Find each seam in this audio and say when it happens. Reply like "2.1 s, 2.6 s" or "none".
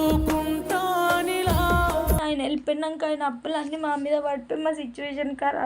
2.2 s